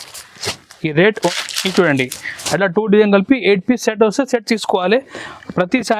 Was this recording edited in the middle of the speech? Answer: yes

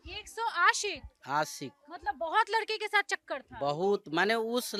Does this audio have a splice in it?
no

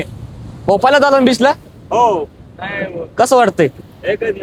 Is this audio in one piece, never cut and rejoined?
yes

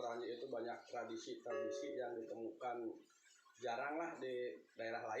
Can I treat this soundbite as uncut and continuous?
yes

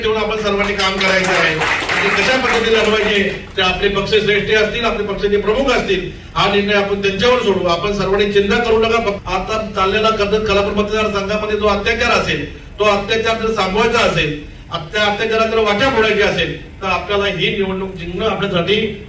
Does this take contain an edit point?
yes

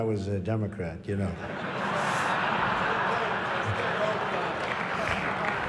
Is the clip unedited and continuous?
no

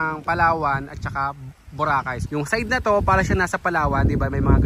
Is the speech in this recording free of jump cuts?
no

